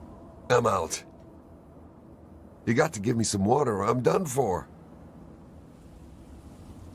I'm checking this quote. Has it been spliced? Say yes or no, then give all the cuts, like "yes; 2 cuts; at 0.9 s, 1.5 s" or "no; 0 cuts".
no; 0 cuts